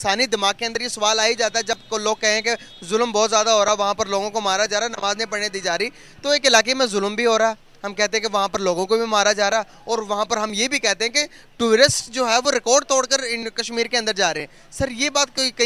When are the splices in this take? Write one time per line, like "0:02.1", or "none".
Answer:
none